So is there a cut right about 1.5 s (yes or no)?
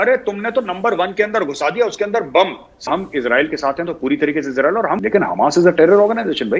no